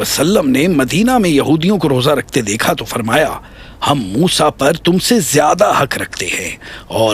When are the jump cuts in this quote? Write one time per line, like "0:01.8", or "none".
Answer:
none